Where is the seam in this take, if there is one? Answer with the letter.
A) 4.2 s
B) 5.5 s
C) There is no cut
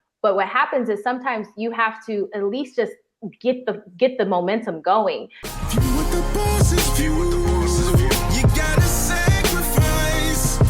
B